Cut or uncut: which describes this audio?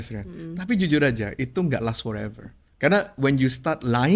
uncut